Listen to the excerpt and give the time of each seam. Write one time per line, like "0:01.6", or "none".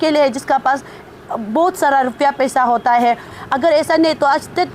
0:03.3